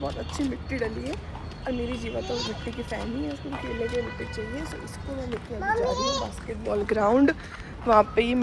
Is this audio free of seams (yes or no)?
yes